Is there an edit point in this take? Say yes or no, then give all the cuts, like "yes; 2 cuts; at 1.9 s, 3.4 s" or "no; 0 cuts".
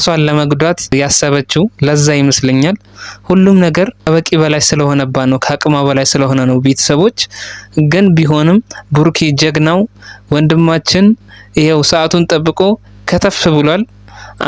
yes; 2 cuts; at 0.9 s, 4.0 s